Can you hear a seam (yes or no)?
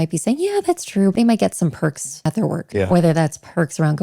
yes